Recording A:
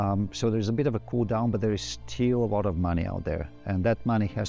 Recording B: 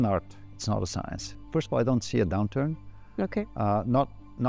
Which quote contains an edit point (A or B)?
B